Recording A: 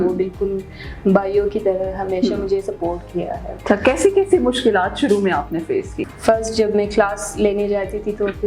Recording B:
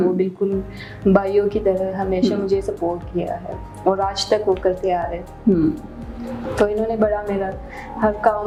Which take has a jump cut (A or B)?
A